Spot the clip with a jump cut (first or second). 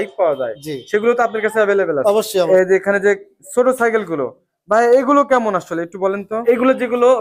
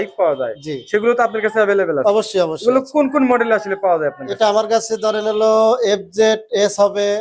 first